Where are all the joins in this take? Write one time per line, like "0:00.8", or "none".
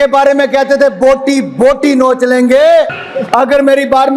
0:03.0